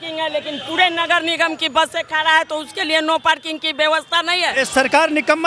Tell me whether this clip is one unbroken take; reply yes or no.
no